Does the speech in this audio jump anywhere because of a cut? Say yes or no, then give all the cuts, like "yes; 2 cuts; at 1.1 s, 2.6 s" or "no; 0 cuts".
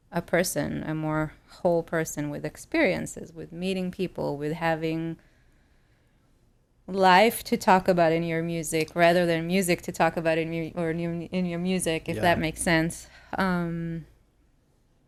no; 0 cuts